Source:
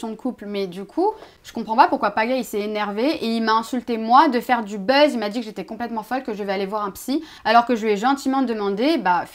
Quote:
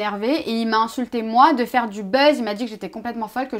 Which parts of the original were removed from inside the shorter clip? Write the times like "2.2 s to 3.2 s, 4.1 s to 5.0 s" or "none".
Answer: none